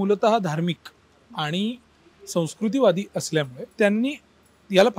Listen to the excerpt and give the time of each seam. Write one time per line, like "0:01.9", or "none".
0:03.6